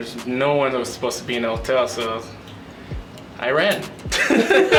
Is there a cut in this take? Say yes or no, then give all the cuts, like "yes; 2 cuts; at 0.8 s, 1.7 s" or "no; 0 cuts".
no; 0 cuts